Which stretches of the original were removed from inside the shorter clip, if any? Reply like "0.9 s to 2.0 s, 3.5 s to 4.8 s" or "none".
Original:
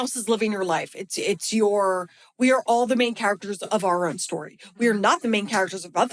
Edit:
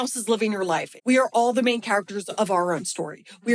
0.9 s to 2.2 s